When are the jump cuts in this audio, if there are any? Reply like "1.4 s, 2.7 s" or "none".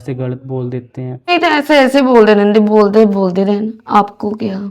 1.3 s